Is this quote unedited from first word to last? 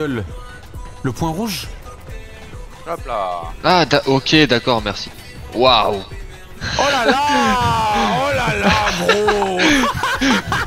yes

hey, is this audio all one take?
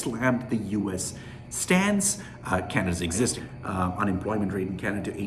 no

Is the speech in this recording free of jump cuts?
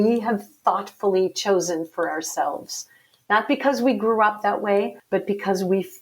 no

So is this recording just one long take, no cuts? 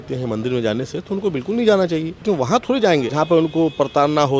no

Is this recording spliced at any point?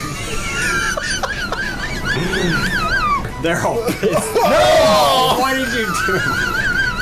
no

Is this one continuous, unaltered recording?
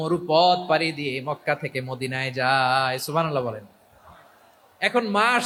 yes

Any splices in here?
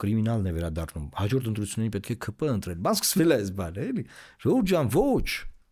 no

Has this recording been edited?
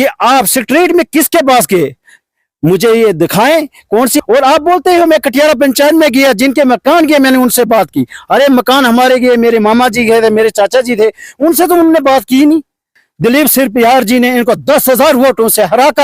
yes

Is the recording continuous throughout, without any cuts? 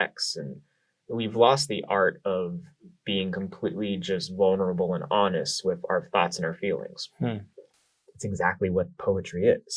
no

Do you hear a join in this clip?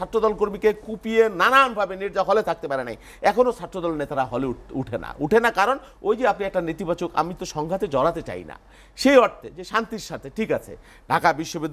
no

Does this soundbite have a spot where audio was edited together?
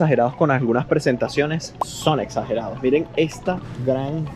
no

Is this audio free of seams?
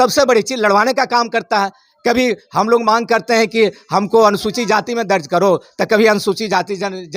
yes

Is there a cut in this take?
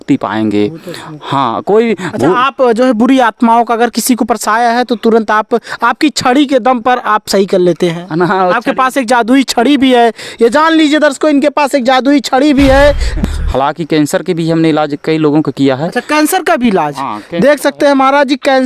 yes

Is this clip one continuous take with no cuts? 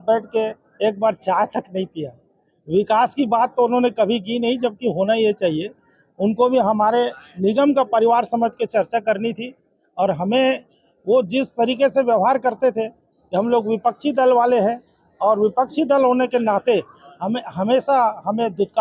yes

